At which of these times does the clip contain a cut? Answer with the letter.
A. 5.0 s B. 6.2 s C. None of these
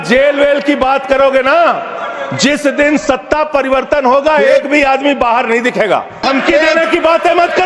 B